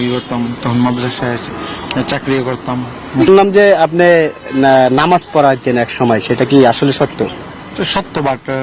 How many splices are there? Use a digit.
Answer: 1